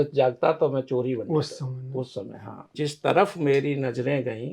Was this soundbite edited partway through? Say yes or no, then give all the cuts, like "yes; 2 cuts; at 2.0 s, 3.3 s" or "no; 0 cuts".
yes; 1 cut; at 2.7 s